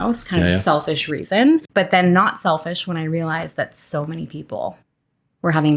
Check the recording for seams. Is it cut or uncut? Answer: cut